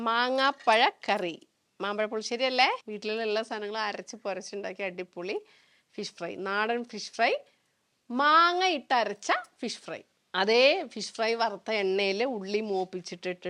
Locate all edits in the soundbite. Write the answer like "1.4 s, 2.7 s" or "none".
none